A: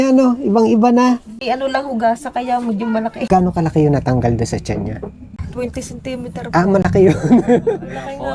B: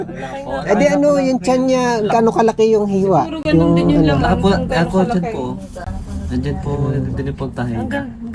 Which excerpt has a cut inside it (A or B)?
A